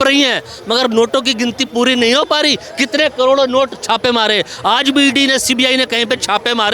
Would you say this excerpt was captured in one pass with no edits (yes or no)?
yes